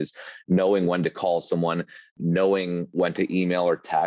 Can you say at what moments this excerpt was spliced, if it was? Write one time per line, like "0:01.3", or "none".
0:02.1
0:02.9